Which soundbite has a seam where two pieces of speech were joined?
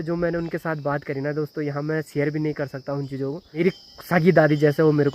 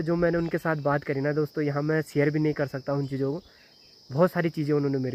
first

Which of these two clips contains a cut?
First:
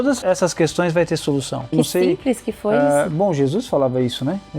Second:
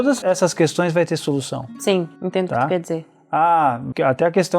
first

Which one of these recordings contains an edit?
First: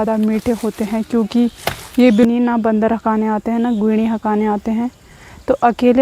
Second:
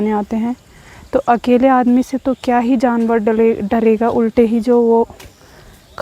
first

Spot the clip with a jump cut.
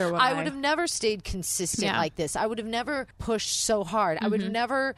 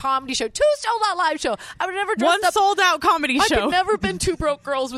first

